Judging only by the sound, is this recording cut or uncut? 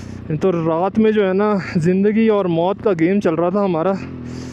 uncut